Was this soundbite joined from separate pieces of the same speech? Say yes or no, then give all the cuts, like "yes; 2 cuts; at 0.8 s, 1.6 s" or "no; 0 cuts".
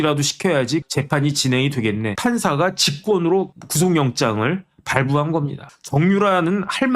yes; 2 cuts; at 0.8 s, 2.1 s